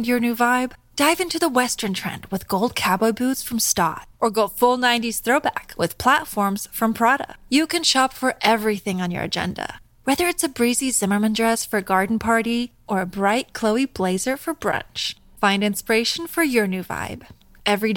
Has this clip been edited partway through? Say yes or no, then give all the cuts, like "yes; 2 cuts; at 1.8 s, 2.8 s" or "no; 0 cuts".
no; 0 cuts